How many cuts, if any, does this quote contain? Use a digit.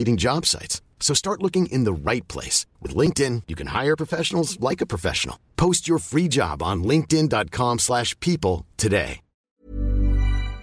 1